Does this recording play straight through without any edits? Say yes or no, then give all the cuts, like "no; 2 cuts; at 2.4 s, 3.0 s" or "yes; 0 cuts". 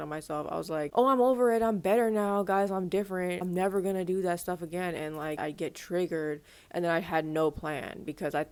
yes; 0 cuts